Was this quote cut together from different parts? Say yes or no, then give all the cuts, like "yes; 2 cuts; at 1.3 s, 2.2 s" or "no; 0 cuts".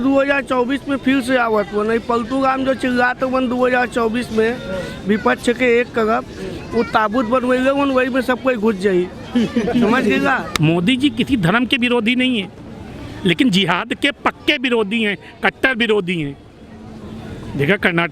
yes; 1 cut; at 10.5 s